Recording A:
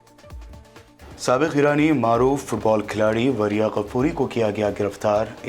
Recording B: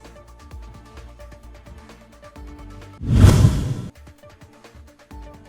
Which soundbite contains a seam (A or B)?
A